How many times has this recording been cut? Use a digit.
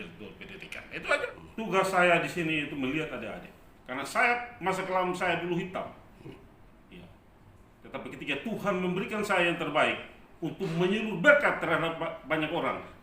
1